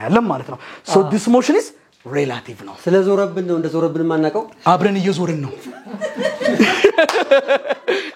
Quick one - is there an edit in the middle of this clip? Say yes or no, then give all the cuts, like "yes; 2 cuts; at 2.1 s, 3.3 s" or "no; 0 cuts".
no; 0 cuts